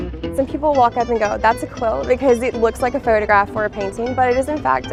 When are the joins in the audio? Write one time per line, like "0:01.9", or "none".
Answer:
none